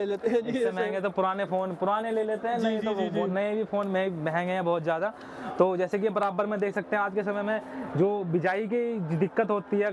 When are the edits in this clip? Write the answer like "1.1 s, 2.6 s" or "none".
none